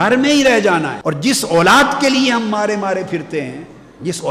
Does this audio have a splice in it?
yes; 1 cut; at 1.0 s

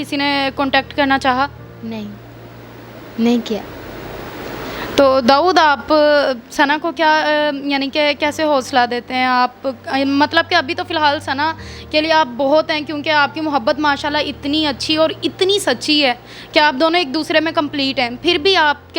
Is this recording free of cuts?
yes; 0 cuts

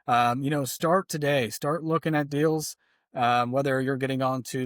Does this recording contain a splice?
no; 0 cuts

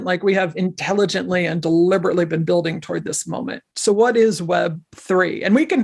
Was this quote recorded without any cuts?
yes; 0 cuts

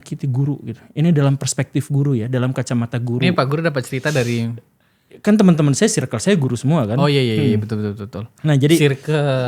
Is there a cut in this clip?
no; 0 cuts

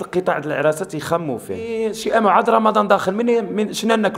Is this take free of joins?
no; 1 cut; at 1.7 s

